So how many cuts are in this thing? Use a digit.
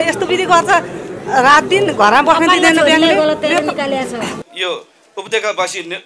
1